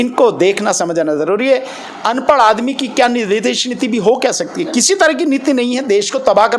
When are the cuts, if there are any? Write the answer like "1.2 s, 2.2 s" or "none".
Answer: none